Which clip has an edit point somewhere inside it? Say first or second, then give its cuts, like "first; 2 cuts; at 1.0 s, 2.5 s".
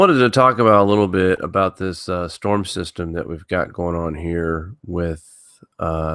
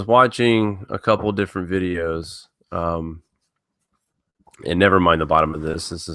first; 1 cut; at 1.4 s